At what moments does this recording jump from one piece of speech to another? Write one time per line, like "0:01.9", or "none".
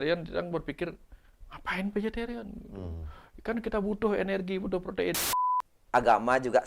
0:05.2